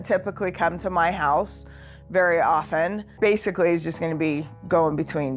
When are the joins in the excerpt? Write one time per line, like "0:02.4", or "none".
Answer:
0:03.0